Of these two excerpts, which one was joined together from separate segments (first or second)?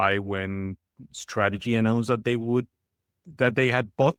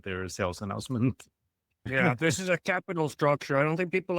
second